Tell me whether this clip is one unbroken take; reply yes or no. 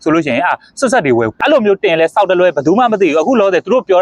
no